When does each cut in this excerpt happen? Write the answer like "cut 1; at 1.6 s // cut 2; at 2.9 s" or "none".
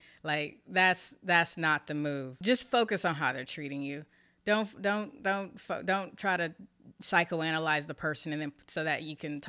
cut 1; at 2.4 s